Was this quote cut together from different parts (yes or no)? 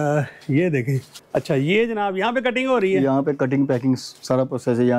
yes